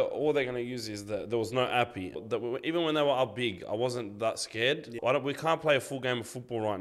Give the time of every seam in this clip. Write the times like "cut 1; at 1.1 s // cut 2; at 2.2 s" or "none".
cut 1; at 2.2 s // cut 2; at 4.9 s